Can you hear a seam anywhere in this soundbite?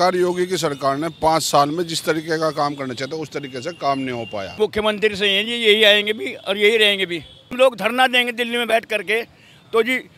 yes; 2 cuts; at 4.5 s, 7.5 s

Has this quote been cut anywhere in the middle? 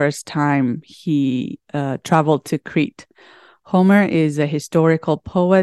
no; 0 cuts

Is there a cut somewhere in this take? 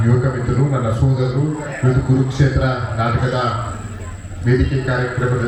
no; 0 cuts

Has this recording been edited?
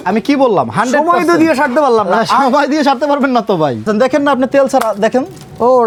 no; 0 cuts

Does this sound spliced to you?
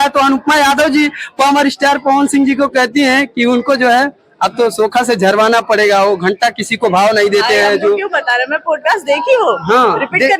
no; 0 cuts

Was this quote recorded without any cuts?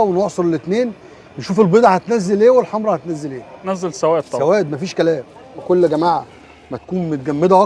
no; 2 cuts; at 3.7 s, 5.6 s

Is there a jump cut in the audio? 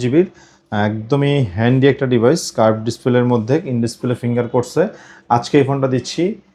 no; 0 cuts

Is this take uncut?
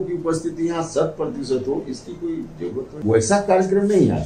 no; 1 cut; at 2.9 s

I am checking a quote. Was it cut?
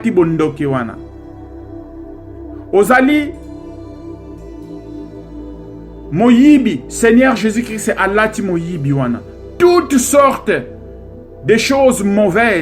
yes; 2 cuts; at 3.8 s, 5.5 s

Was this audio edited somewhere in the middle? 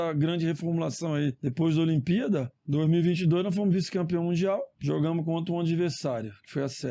yes; 3 cuts; at 1.4 s, 2.6 s, 4.7 s

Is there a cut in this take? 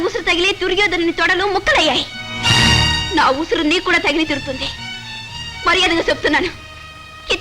no; 0 cuts

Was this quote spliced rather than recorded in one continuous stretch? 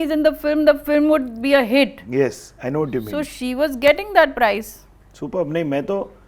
no; 0 cuts

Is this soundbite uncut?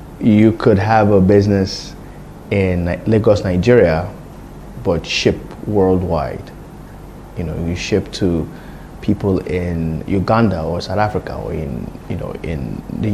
yes; 0 cuts

